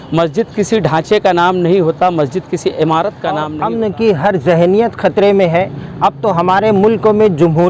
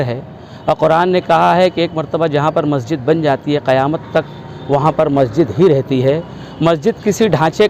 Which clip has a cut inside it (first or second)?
first